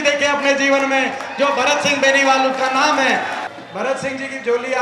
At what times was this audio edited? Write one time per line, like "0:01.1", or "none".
0:03.4